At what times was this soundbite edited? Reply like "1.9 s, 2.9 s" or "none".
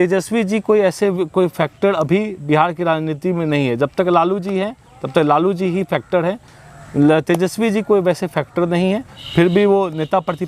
none